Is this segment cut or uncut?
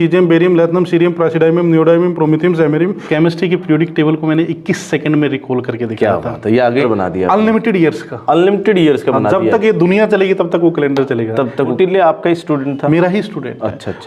cut